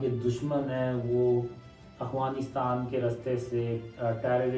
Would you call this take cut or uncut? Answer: uncut